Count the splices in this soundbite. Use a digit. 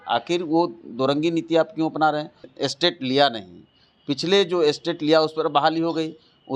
1